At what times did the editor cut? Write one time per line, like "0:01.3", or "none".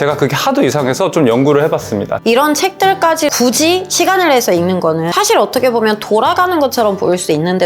0:02.2
0:03.3
0:05.1